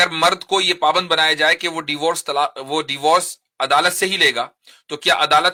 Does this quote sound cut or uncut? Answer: uncut